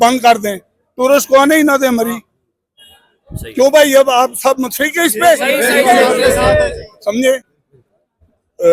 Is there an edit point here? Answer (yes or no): no